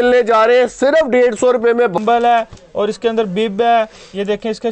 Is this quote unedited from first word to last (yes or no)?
no